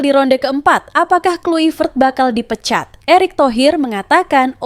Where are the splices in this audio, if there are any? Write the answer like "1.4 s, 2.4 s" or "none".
none